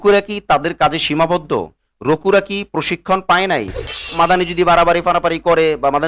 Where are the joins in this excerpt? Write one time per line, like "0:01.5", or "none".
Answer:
0:04.1